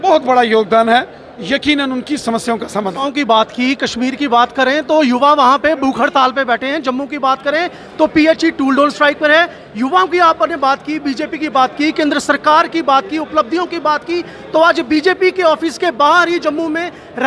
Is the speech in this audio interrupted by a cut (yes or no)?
yes